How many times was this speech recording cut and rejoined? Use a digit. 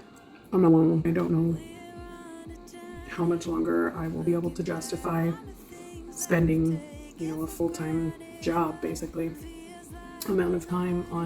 1